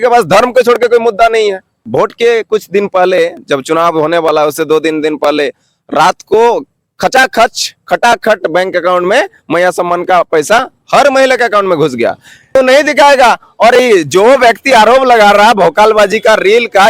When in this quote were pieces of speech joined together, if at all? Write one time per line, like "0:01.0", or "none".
0:01.7
0:12.6